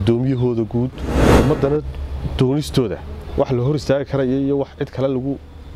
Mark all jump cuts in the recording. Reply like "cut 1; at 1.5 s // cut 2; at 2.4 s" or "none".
cut 1; at 1.2 s